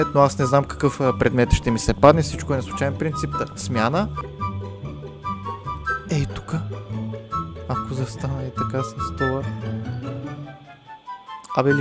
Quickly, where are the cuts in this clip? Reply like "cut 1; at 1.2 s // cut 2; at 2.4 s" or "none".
cut 1; at 4.2 s